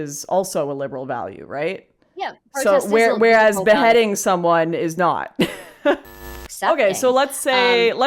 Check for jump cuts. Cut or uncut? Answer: cut